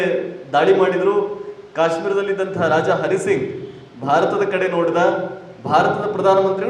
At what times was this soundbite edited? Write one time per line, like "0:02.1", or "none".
none